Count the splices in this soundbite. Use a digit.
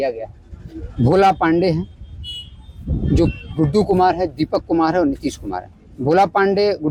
0